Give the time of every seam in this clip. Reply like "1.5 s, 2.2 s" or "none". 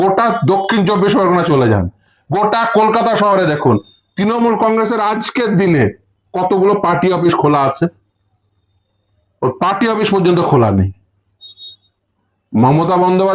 none